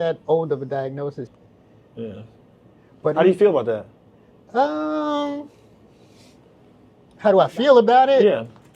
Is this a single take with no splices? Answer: no; 1 cut; at 1.3 s

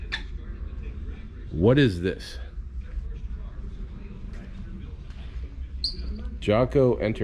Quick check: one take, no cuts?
yes; 0 cuts

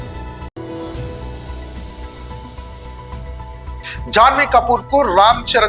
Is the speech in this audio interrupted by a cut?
yes; 1 cut; at 3.8 s

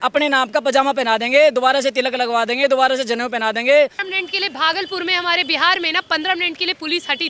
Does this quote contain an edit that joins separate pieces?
yes; 1 cut; at 4.1 s

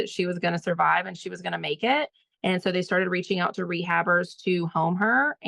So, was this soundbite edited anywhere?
no; 0 cuts

